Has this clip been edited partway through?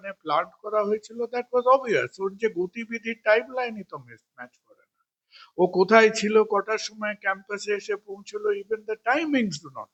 no; 0 cuts

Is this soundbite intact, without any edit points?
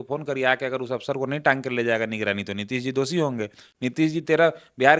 yes; 0 cuts

